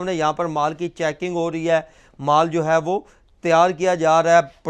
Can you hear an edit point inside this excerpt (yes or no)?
no